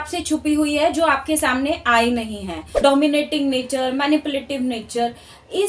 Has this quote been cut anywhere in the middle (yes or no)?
yes